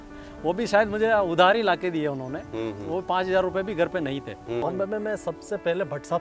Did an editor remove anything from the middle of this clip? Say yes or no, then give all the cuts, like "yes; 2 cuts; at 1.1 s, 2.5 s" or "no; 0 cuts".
yes; 1 cut; at 4.6 s